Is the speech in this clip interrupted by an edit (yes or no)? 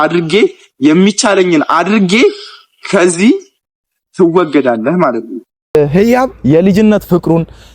yes